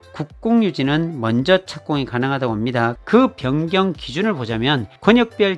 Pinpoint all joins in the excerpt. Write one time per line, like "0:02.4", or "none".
0:02.9